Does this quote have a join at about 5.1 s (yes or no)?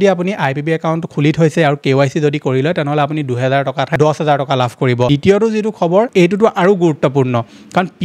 yes